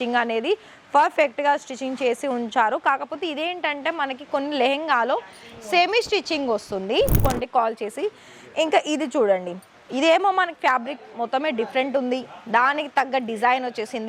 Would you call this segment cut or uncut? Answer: cut